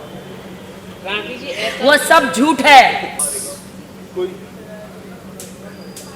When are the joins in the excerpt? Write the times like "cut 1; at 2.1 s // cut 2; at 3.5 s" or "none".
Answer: cut 1; at 3.3 s